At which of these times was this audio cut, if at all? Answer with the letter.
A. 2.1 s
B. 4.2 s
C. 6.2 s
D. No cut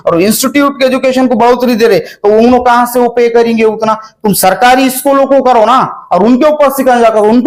D